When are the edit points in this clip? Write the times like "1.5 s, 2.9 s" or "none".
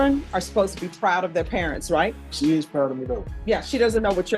2.2 s, 3.3 s